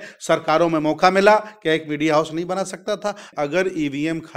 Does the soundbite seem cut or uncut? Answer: cut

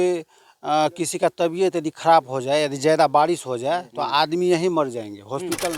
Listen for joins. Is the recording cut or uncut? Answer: uncut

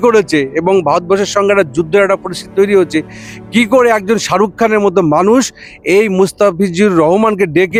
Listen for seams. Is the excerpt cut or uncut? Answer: uncut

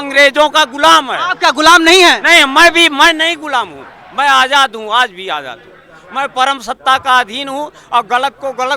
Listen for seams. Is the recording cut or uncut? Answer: uncut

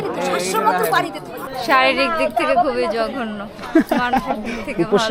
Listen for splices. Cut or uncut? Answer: cut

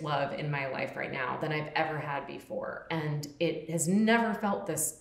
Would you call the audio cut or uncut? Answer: uncut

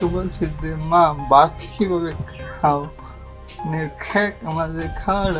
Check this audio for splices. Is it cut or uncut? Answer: uncut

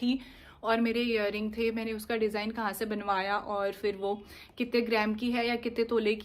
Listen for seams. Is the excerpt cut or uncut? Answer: uncut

